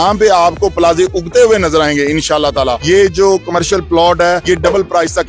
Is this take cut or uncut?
cut